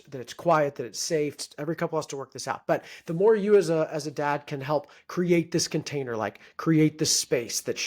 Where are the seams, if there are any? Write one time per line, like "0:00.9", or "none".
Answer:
0:01.5